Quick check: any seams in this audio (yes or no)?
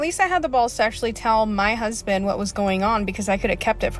no